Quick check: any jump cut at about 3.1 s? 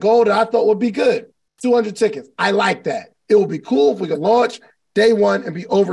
no; 0 cuts

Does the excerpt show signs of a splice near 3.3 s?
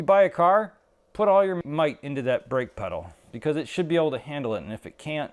no; 1 cut; at 1.6 s

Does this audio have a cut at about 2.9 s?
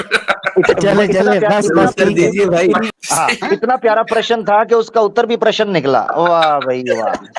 yes; 1 cut; at 2.9 s

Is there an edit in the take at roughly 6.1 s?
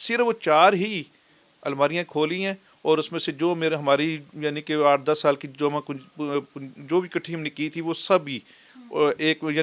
no; 0 cuts

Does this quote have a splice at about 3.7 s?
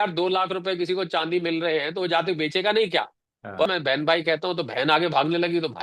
yes; 1 cut; at 3.7 s

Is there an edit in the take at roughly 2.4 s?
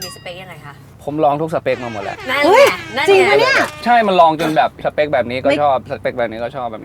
no; 2 cuts; at 3.8 s, 4.8 s

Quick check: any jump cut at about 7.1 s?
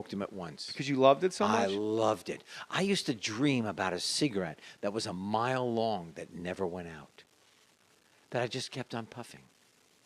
yes; 1 cut; at 7.1 s

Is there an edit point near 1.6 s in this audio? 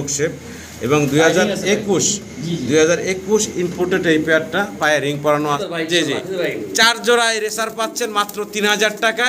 no; 1 cut; at 5.6 s

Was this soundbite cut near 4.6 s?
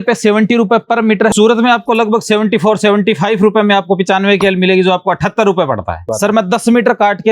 no; 2 cuts; at 1.3 s, 6.1 s

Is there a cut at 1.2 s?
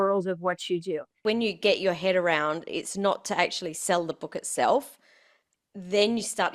yes; 1 cut; at 1.2 s

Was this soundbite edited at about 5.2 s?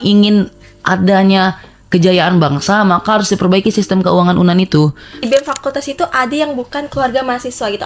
yes; 1 cut; at 5.2 s

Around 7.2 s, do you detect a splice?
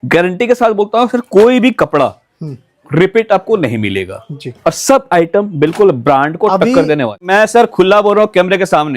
yes; 1 cut; at 7.2 s

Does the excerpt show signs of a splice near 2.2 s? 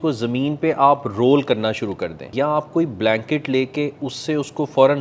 yes; 1 cut; at 2.2 s

